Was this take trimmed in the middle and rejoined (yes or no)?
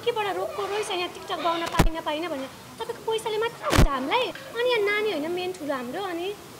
no